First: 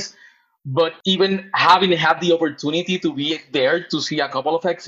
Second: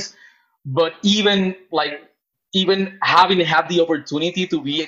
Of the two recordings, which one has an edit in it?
first; 1 cut; at 0.9 s

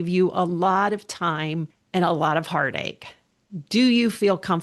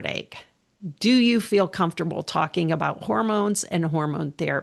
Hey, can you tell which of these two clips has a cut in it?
first; 1 cut; at 1.7 s

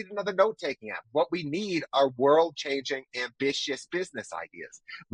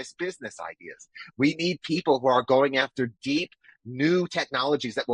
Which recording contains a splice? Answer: first; 1 cut; at 1.0 s

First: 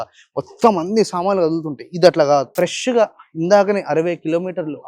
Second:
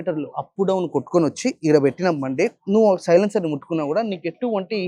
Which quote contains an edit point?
first; 1 cut; at 2.5 s

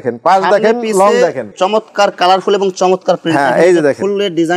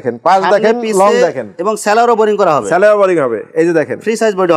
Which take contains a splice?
first; 1 cut; at 1.4 s

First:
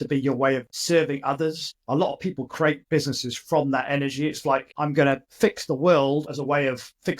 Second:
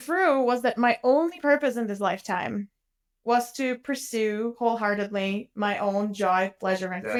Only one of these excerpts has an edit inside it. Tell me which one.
first; 4 cuts; at 1.8 s, 2.8 s, 5.0 s, 6.3 s

